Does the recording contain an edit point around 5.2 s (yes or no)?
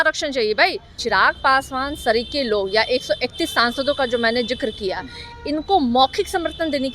no